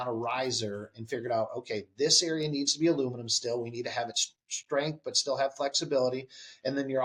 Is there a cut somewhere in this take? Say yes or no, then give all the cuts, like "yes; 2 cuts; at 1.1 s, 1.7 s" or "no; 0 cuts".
no; 0 cuts